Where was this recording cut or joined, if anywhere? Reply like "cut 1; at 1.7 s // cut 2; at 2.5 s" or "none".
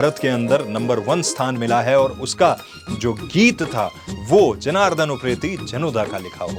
none